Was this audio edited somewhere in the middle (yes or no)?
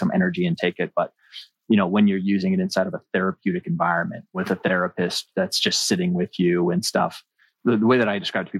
yes